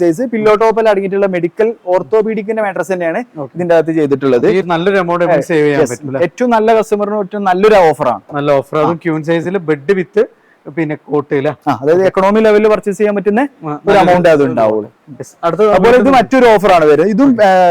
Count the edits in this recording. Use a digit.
1